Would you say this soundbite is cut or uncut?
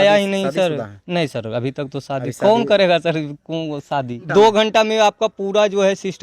cut